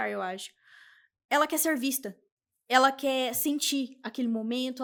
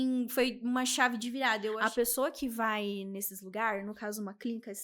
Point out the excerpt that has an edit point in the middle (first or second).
second